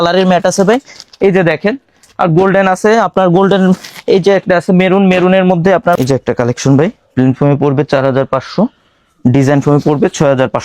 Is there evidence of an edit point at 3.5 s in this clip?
no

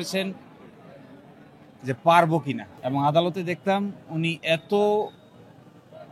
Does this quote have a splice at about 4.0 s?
no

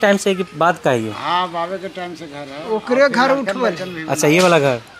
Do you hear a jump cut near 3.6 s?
no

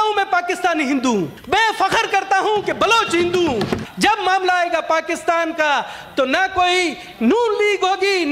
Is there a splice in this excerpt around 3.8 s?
yes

